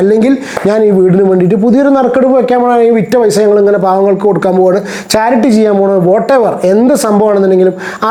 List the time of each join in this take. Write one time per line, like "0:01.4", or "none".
none